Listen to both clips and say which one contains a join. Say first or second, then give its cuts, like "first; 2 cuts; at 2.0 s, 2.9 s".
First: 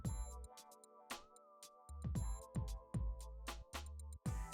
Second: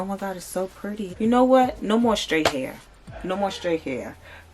second; 1 cut; at 1.1 s